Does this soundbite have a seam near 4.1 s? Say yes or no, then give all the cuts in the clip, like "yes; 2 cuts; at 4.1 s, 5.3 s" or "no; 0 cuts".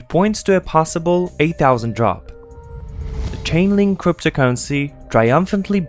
no; 1 cut; at 2.8 s